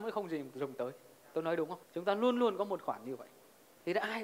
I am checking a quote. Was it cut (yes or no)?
yes